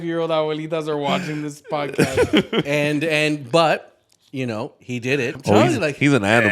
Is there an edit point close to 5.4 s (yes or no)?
yes